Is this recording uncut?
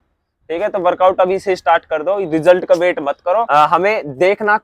no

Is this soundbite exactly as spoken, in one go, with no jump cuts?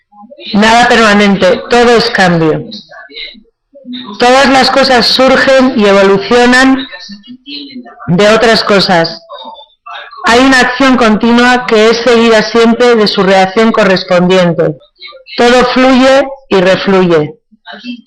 yes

